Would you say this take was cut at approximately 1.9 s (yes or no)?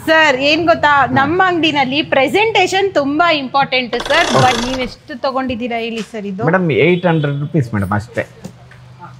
no